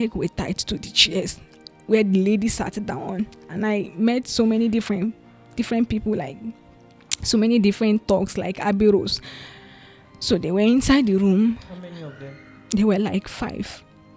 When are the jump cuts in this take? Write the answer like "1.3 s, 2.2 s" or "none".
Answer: none